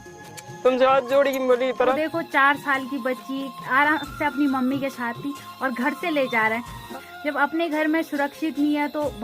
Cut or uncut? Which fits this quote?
cut